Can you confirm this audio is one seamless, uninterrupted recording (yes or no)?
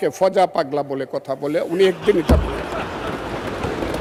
yes